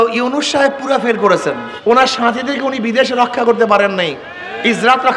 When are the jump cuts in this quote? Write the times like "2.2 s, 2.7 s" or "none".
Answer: 1.2 s